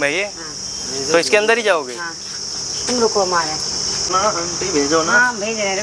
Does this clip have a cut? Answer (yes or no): yes